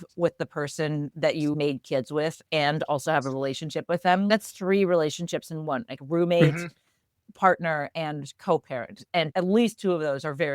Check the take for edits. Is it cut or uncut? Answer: cut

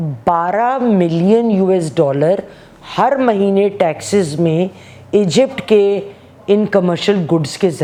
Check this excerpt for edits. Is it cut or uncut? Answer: uncut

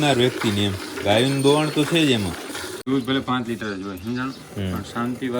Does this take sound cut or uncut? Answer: cut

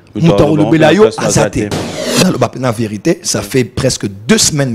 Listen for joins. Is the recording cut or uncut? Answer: cut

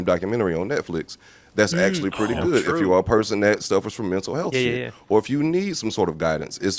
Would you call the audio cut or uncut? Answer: uncut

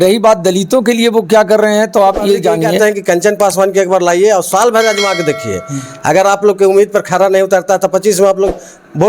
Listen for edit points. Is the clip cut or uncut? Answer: cut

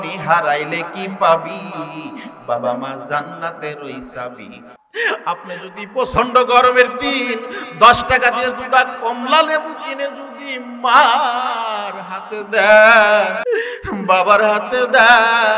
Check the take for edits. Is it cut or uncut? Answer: cut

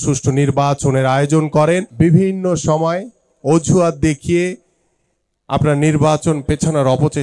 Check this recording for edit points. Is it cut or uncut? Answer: cut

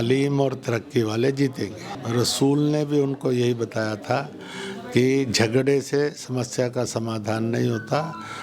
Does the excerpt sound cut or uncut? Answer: cut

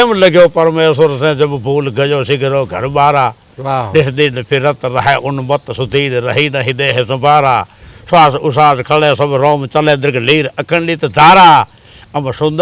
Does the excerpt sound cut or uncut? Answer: uncut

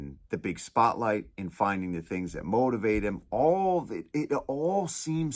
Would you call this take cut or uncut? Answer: uncut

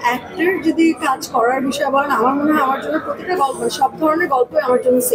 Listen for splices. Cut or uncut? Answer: uncut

